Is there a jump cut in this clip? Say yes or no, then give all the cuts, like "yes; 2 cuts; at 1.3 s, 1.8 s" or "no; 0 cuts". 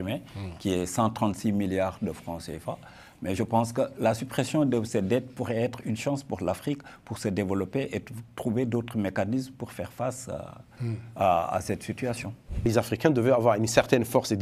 yes; 1 cut; at 12.6 s